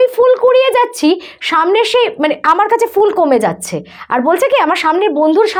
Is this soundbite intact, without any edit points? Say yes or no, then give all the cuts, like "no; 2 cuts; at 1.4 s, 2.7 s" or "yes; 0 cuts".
yes; 0 cuts